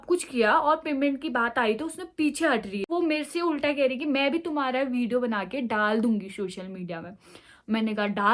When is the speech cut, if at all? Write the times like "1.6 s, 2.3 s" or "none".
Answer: 2.9 s